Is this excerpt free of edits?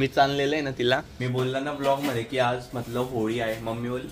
no; 1 cut; at 1.1 s

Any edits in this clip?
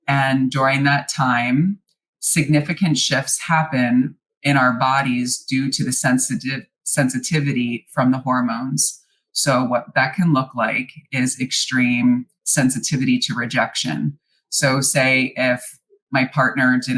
no; 0 cuts

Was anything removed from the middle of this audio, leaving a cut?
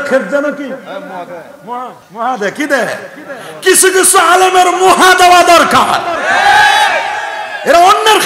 yes; 1 cut; at 2.0 s

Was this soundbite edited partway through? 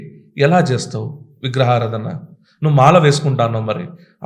no; 0 cuts

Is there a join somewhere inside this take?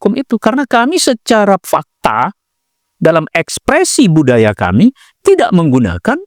no; 0 cuts

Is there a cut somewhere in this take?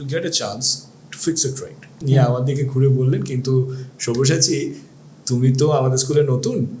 yes; 1 cut; at 2.0 s

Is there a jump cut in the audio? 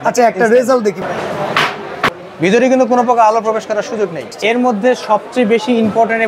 yes; 3 cuts; at 1.0 s, 2.2 s, 4.3 s

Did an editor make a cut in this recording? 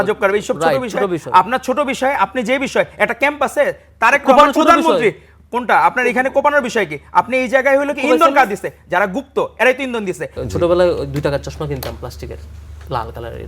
yes; 1 cut; at 10.3 s

